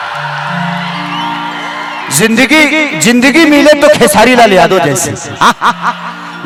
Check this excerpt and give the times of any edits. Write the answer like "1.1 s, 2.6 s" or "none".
none